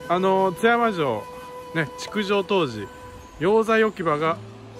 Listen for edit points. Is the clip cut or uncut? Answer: uncut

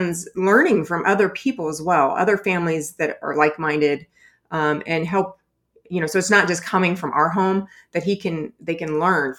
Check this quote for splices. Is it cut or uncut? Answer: uncut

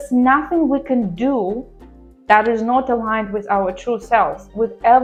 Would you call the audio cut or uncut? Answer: uncut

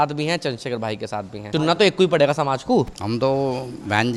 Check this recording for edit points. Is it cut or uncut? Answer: uncut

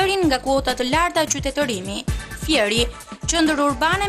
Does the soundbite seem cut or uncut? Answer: uncut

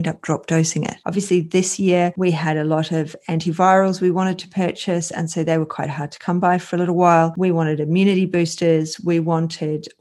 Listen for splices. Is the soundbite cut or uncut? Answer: cut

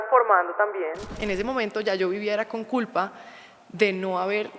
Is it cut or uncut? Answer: cut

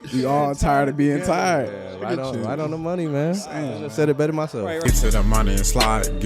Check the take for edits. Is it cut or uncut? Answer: cut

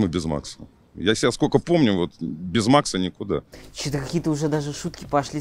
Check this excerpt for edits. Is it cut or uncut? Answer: uncut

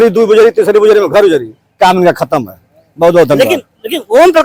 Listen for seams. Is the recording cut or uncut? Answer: uncut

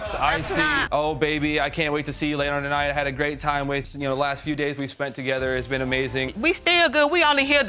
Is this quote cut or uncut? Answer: cut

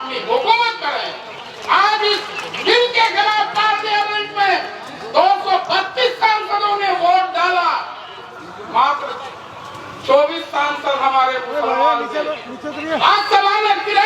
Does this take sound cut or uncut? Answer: uncut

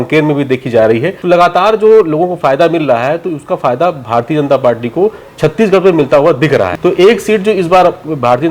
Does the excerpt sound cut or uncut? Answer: cut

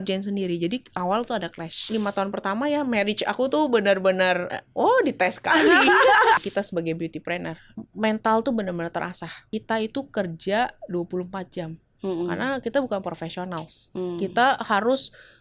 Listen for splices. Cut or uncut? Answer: cut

